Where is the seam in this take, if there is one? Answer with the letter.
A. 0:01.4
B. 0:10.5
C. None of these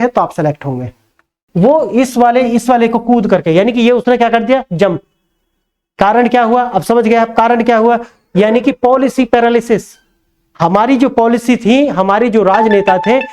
A